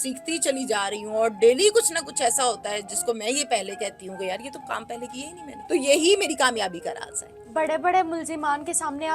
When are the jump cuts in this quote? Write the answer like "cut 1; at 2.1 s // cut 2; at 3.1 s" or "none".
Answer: cut 1; at 5.5 s